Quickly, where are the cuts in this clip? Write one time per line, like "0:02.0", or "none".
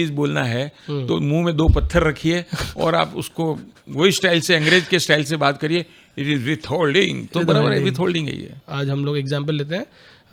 none